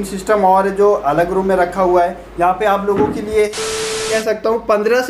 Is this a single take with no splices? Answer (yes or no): no